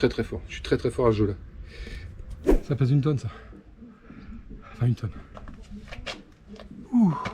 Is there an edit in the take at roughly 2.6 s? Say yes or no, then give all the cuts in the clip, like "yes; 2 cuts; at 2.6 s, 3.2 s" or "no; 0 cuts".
yes; 1 cut; at 2.6 s